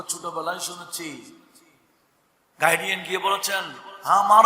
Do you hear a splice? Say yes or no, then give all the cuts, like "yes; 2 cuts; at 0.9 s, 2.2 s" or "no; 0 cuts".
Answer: no; 0 cuts